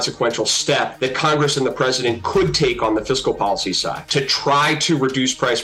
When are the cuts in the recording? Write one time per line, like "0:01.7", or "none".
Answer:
0:00.9
0:04.0